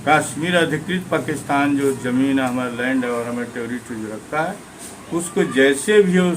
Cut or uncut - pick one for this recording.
uncut